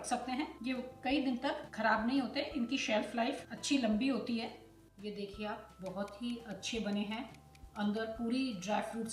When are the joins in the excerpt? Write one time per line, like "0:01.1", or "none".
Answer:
0:04.9